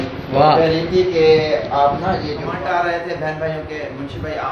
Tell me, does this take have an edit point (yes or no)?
yes